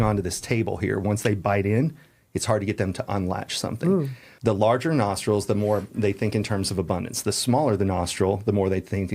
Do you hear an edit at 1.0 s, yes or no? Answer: no